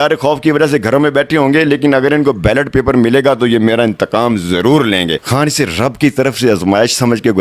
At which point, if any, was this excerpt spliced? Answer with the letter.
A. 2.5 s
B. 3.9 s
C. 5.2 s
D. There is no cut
C